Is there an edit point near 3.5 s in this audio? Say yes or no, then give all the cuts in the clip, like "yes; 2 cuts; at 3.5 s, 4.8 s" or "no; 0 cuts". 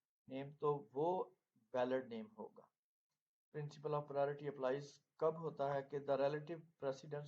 yes; 1 cut; at 3.5 s